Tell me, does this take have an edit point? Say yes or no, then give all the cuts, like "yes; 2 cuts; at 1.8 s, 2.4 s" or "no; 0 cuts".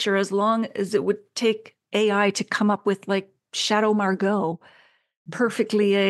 no; 0 cuts